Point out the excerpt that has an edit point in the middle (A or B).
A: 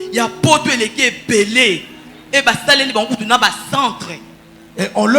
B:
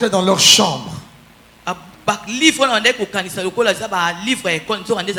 A